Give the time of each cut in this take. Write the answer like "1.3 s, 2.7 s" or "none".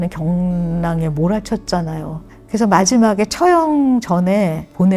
none